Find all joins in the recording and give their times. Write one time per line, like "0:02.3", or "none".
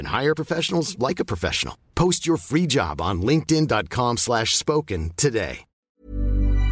0:05.8